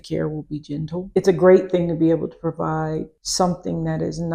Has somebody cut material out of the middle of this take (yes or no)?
yes